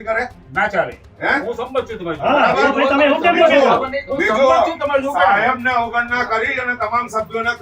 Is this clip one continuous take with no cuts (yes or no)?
yes